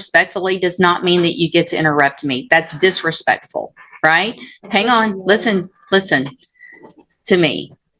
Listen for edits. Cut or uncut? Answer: uncut